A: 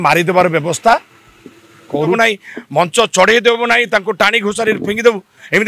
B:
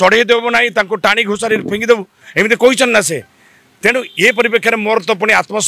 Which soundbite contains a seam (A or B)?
A